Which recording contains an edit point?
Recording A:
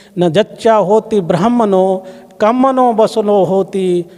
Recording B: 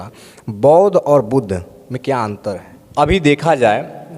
B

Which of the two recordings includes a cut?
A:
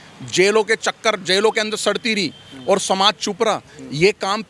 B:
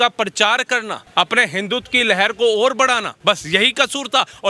B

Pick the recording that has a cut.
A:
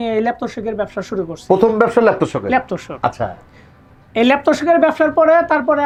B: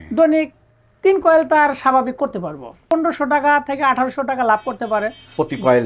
B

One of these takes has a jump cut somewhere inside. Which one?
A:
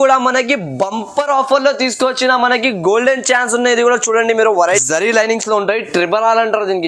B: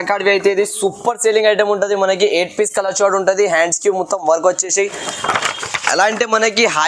A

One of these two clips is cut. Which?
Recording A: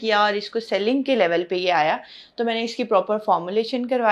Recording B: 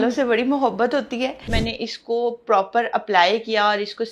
B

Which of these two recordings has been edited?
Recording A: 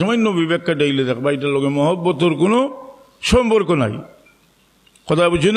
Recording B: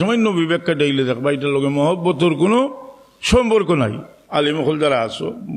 B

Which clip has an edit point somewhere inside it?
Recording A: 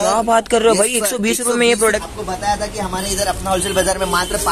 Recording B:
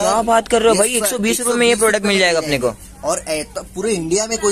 A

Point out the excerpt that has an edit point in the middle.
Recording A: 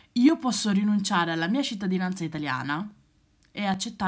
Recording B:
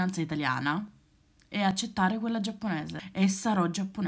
B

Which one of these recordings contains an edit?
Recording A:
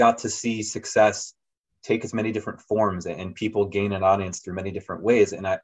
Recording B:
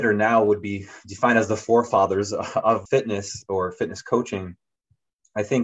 B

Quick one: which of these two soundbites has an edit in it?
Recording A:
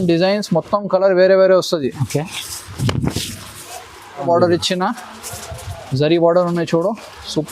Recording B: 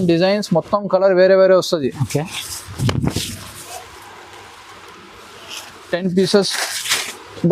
A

